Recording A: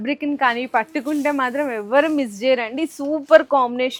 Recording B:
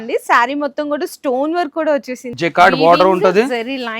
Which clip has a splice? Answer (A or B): B